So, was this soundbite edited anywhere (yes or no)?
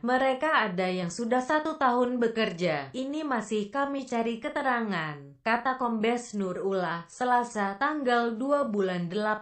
yes